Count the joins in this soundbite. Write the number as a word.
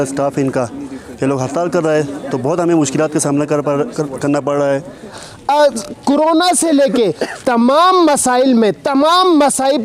one